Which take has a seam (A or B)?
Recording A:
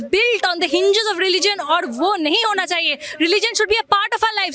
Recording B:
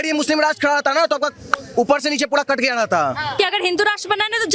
B